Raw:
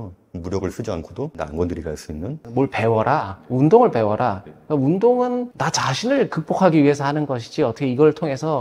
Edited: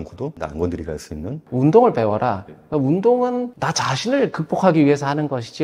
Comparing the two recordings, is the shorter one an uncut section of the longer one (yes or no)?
no